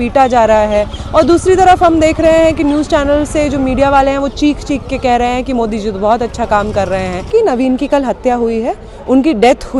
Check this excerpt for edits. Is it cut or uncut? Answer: cut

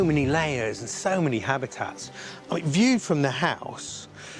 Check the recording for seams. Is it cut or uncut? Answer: uncut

